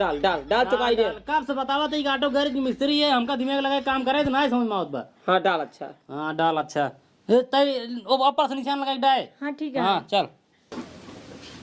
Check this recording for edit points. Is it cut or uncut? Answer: cut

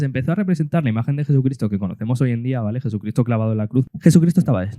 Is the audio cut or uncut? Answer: cut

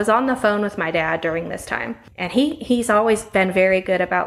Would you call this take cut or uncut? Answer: cut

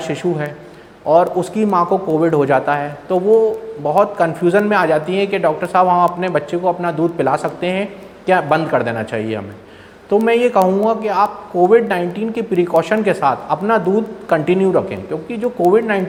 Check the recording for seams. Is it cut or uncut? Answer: uncut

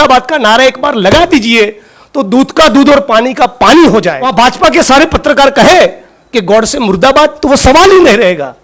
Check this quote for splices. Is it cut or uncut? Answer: cut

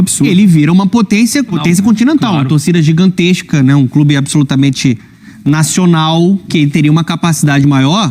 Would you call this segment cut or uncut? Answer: cut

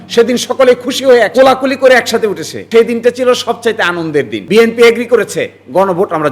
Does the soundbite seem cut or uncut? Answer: cut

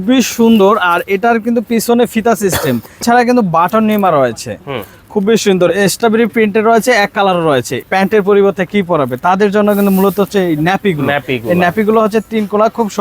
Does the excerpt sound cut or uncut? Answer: cut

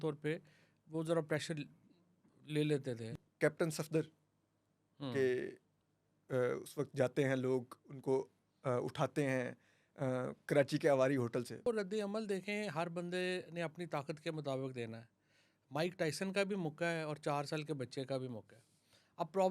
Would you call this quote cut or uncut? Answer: cut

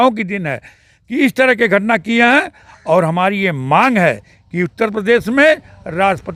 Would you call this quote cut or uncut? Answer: uncut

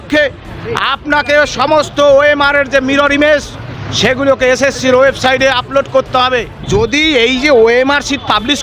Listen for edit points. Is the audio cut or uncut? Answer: cut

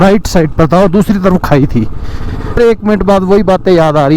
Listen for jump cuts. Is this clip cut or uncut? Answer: cut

